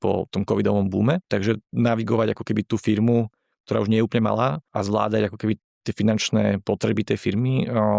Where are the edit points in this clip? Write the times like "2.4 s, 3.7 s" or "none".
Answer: 1.3 s, 4.7 s